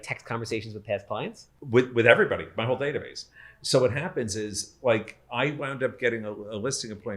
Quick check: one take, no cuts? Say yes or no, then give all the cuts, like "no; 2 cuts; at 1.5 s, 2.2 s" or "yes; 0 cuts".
no; 1 cut; at 1.5 s